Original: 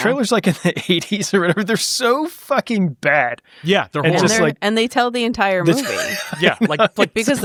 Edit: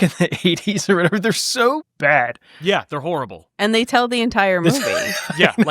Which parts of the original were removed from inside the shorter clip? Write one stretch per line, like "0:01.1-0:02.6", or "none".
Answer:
0:02.3-0:02.9